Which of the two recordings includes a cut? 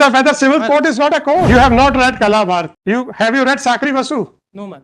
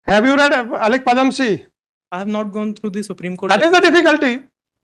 first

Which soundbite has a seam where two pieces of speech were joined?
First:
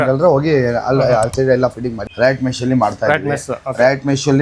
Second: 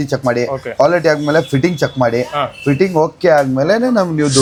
first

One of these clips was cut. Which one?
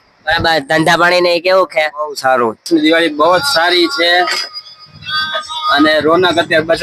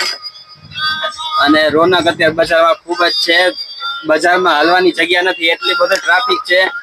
first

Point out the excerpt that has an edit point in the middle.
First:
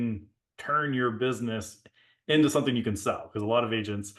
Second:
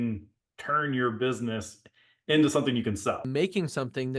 second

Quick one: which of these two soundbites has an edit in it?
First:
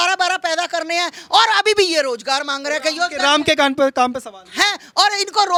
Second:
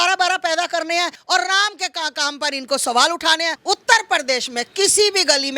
second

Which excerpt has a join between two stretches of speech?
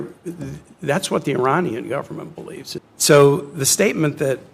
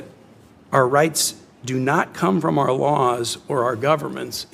first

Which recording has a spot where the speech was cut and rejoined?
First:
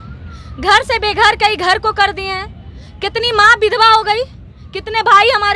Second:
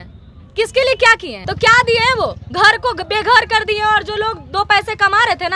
second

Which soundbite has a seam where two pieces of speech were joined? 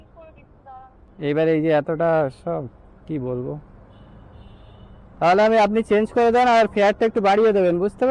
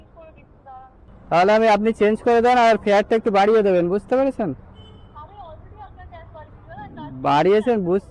second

